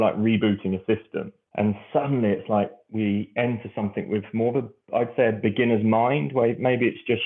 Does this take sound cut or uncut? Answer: cut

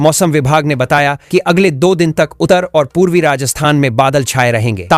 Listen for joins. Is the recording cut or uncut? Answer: uncut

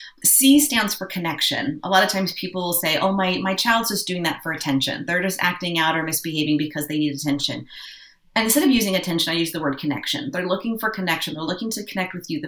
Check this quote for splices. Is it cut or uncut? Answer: uncut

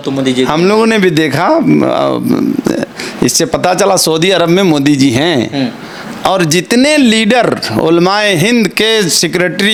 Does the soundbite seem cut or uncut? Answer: uncut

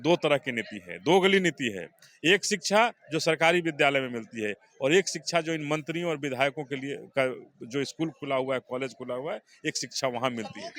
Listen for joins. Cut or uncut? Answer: uncut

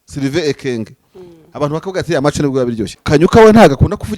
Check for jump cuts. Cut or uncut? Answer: cut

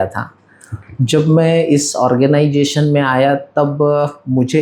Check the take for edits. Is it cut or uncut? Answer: uncut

